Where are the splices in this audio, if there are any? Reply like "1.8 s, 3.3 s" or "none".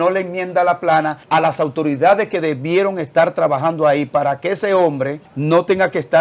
1.2 s, 5.3 s